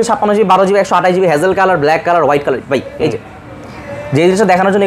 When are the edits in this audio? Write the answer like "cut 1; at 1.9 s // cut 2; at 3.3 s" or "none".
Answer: none